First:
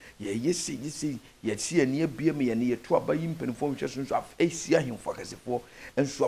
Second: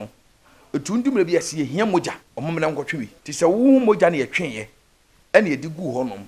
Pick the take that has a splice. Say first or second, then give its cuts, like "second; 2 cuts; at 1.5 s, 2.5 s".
second; 2 cuts; at 2.3 s, 3.2 s